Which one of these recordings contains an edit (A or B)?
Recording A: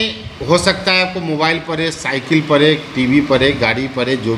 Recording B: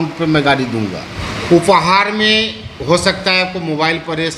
B